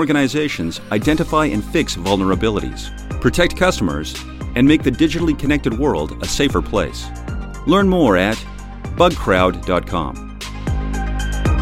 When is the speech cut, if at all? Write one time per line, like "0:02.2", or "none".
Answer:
0:10.4